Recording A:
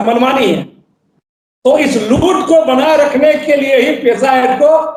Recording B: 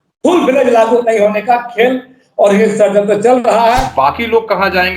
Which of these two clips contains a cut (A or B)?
B